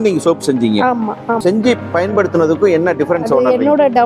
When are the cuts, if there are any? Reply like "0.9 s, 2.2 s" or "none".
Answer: 1.4 s